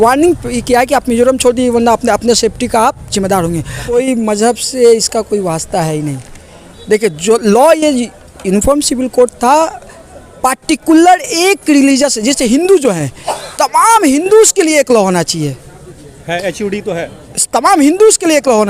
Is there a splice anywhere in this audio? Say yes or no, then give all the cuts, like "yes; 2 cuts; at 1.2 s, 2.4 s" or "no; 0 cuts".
yes; 1 cut; at 3.9 s